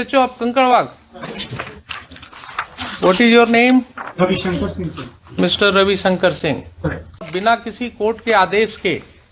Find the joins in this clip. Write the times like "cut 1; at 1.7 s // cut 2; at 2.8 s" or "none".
cut 1; at 7.3 s